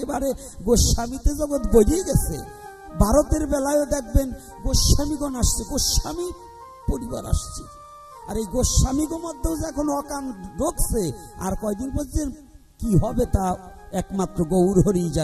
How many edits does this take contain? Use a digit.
0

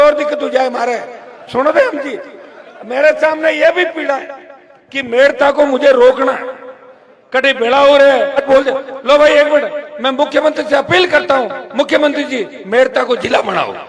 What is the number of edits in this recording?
1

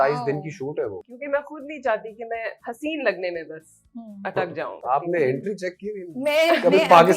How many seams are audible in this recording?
3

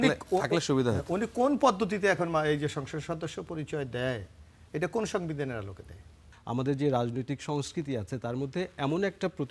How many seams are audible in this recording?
1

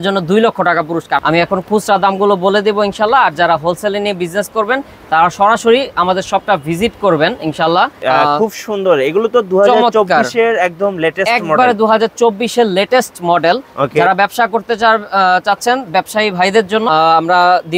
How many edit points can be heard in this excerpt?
3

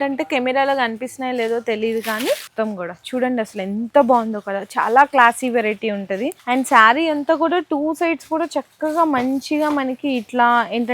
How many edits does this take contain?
2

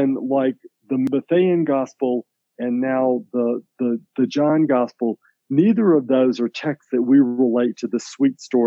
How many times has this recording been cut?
1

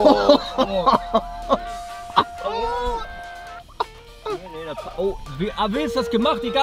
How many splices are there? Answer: 1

